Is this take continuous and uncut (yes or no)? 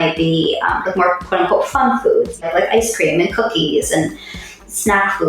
no